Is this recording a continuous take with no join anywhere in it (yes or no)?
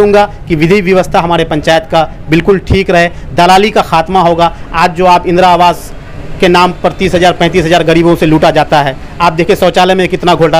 yes